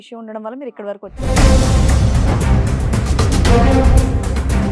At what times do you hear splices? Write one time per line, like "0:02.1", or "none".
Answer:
0:01.2